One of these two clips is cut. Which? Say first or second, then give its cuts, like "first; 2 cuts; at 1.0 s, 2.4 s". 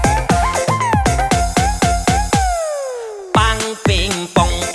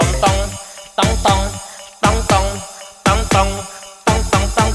first; 1 cut; at 1.3 s